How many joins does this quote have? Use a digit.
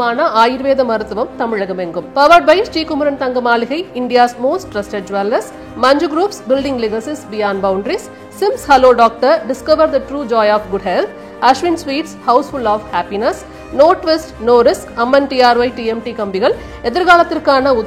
0